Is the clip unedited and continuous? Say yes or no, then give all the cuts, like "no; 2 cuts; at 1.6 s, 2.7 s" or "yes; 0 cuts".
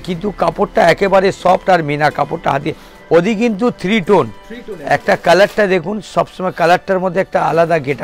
yes; 0 cuts